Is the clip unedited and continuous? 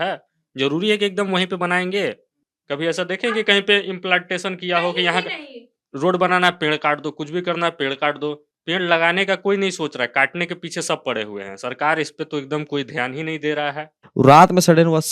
no; 2 cuts; at 2.3 s, 14.0 s

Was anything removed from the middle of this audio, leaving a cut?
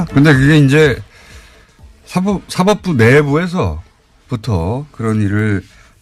yes; 1 cut; at 1.2 s

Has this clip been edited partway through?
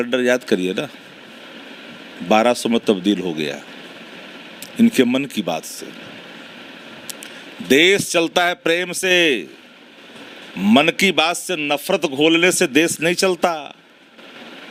no; 0 cuts

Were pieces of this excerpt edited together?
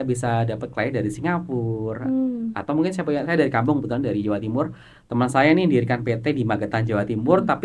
no; 0 cuts

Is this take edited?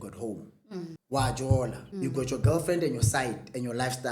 yes; 2 cuts; at 1.0 s, 1.8 s

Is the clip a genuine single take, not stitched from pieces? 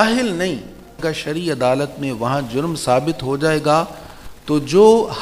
no; 1 cut; at 1.0 s

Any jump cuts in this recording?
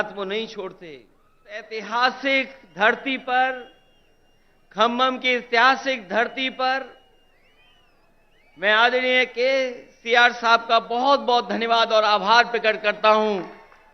yes; 1 cut; at 1.8 s

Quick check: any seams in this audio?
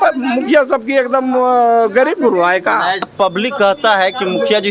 yes; 1 cut; at 3.1 s

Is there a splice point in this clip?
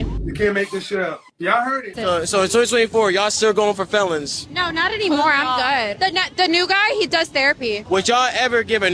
no; 0 cuts

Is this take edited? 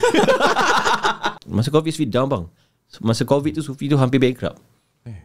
yes; 1 cut; at 1.3 s

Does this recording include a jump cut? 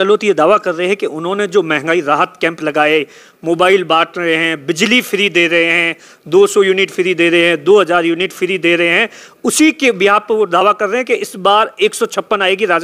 no; 0 cuts

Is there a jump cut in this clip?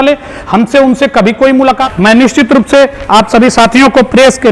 yes; 1 cut; at 1.8 s

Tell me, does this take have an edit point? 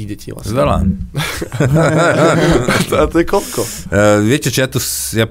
no; 0 cuts

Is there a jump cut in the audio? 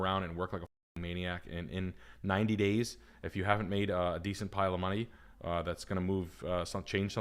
no; 0 cuts

